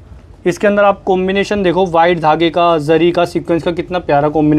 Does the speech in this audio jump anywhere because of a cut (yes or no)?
no